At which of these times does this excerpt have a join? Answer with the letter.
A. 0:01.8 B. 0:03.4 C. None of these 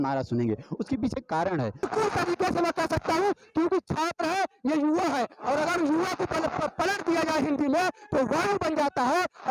A